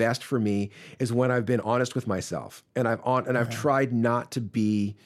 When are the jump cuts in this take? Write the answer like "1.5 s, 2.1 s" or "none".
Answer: 1.6 s